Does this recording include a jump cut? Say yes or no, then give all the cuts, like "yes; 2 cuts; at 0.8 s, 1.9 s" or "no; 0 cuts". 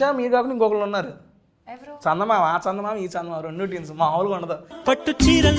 no; 0 cuts